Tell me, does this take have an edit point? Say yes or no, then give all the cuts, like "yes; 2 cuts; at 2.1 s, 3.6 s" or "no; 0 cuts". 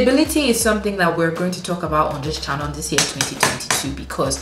no; 0 cuts